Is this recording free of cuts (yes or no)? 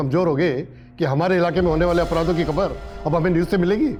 yes